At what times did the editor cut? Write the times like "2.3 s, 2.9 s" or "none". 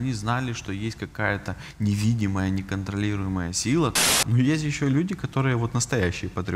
4.1 s